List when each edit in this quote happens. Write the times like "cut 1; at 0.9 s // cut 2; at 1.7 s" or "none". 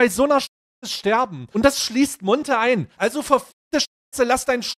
cut 1; at 1.4 s // cut 2; at 2.9 s